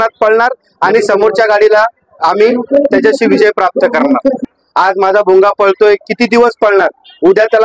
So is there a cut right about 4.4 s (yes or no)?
yes